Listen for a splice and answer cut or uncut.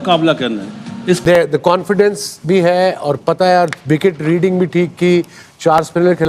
cut